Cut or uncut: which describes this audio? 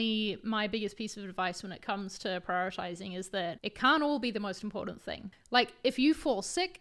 cut